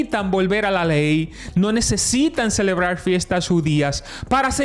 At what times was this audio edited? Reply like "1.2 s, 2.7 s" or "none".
none